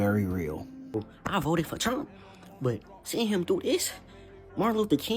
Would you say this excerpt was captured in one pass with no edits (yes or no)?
no